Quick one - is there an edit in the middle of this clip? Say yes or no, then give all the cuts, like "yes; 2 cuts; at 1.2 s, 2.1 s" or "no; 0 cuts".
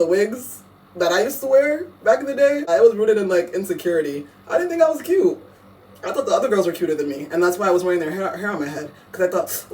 yes; 1 cut; at 2.7 s